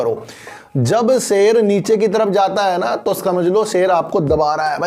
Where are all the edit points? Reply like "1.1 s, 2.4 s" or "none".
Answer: none

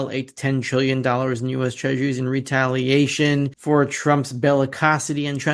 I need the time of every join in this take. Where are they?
none

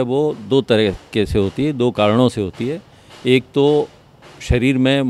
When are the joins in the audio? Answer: none

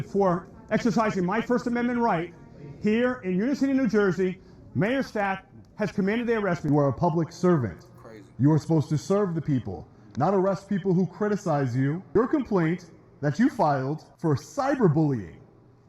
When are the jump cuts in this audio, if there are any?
6.6 s, 12.1 s, 14.1 s

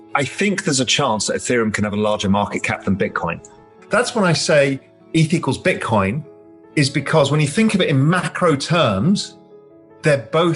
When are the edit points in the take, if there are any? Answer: 3.8 s

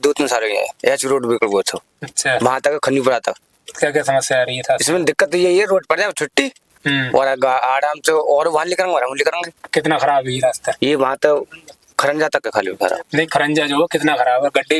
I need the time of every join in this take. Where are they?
none

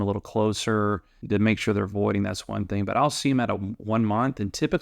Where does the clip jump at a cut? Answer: 1.1 s

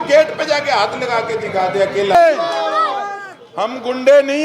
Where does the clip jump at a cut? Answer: 2.1 s

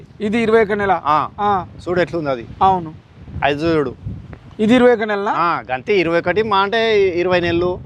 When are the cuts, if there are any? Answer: none

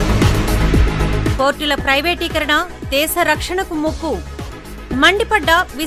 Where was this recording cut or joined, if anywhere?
none

